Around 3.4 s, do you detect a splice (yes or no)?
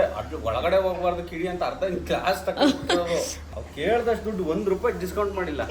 yes